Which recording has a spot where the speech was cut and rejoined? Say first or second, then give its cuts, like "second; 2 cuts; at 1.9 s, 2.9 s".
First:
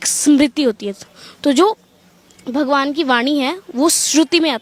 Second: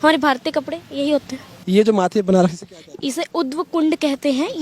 second; 1 cut; at 1.5 s